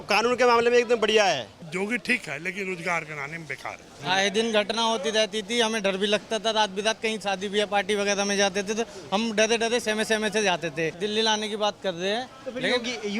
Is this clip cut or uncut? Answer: cut